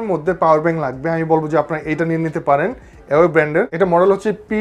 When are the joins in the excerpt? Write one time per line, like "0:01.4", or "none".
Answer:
none